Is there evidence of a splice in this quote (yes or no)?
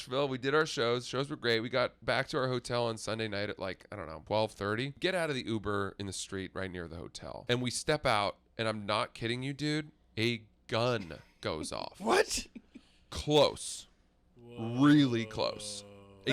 yes